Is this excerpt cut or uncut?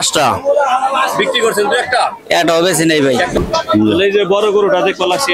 cut